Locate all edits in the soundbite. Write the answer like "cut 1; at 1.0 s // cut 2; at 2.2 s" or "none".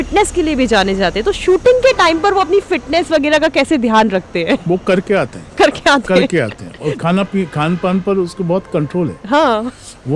none